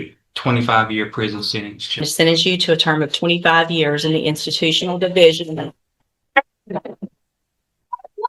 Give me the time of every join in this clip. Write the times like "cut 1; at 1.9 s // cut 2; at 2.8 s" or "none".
cut 1; at 2.1 s